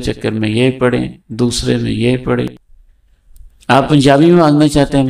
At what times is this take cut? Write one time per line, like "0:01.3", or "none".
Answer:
0:02.6

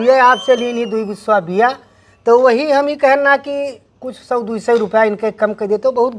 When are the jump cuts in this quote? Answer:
none

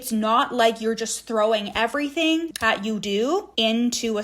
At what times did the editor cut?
0:02.5

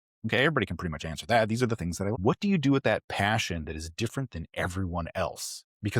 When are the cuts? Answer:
0:02.1

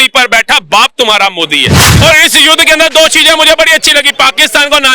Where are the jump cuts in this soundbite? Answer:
0:01.8

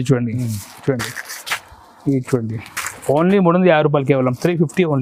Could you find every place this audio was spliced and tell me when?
none

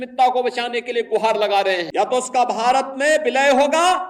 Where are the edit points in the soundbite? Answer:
0:01.9

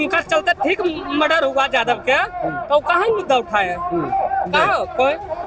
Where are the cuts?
none

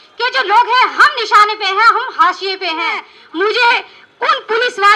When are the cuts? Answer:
0:03.1

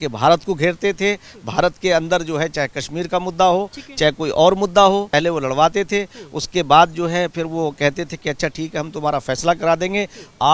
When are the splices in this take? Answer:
0:05.1

